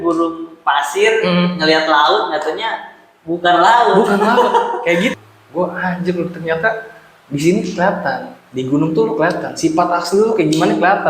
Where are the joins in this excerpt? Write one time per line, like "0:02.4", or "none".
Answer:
0:05.1